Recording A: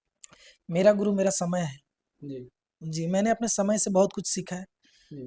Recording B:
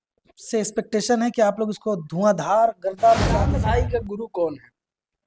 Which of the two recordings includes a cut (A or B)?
B